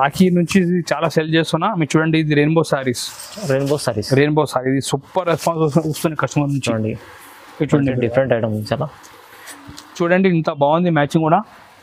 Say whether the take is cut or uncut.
cut